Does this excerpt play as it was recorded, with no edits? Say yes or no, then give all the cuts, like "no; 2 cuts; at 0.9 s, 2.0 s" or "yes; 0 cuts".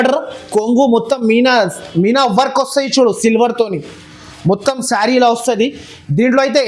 yes; 0 cuts